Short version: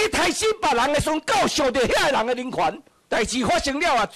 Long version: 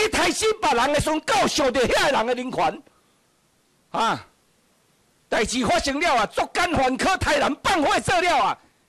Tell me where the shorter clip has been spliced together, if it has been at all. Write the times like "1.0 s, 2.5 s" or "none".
2.9 s

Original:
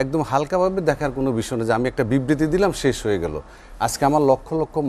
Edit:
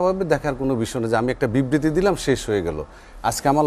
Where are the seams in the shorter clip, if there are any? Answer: none

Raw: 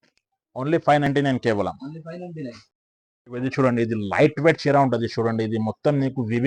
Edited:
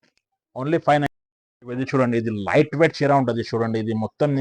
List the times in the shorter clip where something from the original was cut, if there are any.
1.1 s

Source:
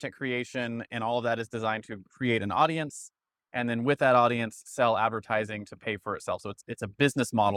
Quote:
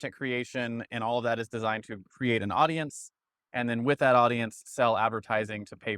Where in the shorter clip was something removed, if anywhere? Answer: none

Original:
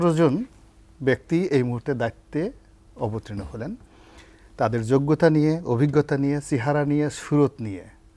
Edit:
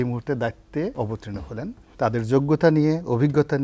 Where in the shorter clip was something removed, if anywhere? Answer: 1.3 s

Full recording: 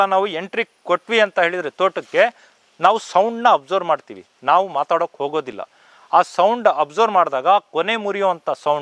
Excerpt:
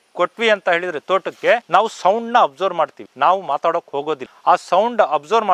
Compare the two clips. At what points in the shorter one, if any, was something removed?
1.6 s, 3.0 s, 4.3 s

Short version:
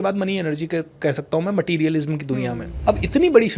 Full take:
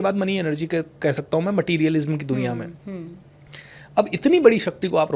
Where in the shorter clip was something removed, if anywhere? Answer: 2.7 s

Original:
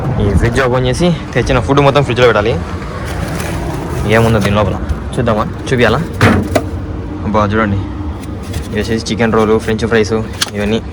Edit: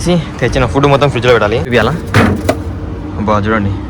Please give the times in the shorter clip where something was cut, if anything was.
1.7 s

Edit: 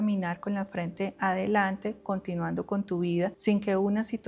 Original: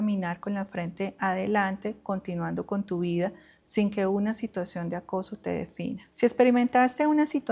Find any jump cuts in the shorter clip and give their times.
3.4 s

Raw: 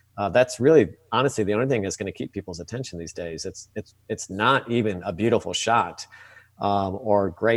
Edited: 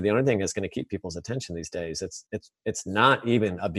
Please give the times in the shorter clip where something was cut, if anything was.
none

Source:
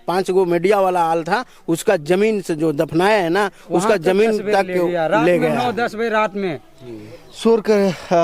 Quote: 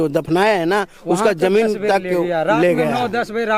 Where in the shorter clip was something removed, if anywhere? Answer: none

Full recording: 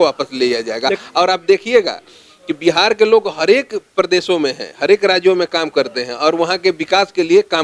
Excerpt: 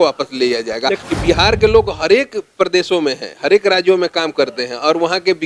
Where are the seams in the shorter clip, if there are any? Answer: 1.0 s

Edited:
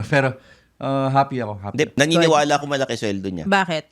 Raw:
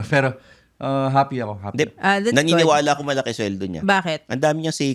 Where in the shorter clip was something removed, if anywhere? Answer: 2.0 s

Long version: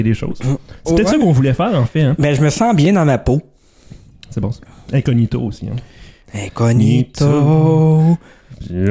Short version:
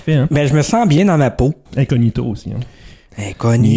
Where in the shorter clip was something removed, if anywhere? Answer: 1.6 s

